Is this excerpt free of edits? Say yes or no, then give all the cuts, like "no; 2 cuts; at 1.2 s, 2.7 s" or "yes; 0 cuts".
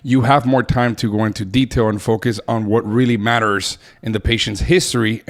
yes; 0 cuts